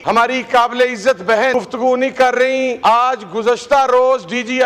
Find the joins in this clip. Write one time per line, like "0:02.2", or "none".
0:01.5
0:02.8